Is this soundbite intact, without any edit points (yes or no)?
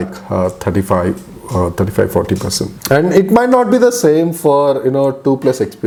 yes